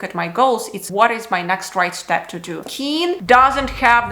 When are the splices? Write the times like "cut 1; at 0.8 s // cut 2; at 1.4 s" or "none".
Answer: cut 1; at 2.5 s

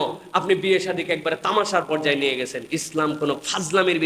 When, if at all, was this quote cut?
none

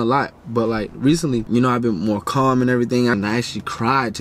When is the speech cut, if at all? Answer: cut 1; at 1.5 s // cut 2; at 3.1 s

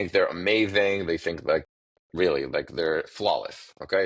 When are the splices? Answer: none

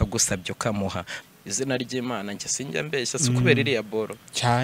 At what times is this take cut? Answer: cut 1; at 1.2 s

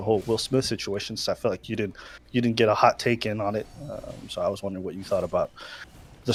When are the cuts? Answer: none

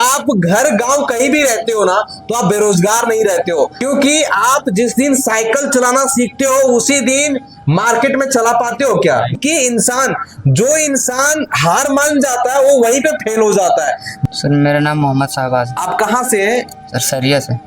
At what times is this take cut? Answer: cut 1; at 3.8 s // cut 2; at 9.4 s // cut 3; at 14.2 s

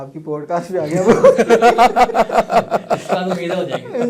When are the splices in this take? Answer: none

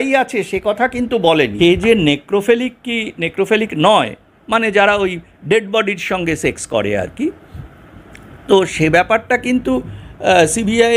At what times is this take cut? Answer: cut 1; at 1.5 s

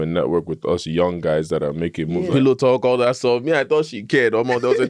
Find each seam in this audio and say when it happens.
cut 1; at 2.3 s

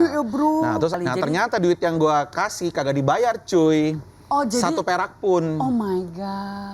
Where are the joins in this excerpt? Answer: cut 1; at 0.9 s

